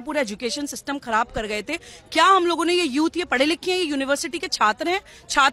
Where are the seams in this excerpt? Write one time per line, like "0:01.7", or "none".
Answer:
none